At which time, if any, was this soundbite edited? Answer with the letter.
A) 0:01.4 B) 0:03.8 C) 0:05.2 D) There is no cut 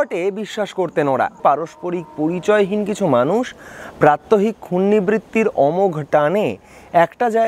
A